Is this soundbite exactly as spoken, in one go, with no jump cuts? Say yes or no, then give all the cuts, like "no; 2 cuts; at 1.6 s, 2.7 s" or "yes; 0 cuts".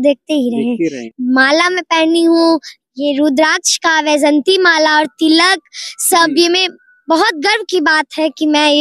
no; 1 cut; at 1.1 s